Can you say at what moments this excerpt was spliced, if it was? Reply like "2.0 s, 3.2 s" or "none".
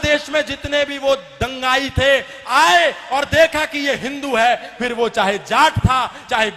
none